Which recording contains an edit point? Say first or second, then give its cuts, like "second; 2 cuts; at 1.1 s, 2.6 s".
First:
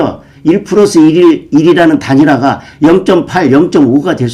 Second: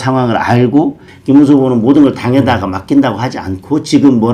second; 1 cut; at 1.0 s